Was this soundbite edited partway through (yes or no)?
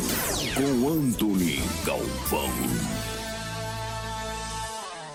no